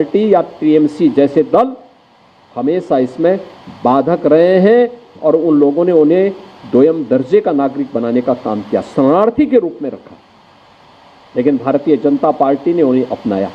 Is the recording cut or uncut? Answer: uncut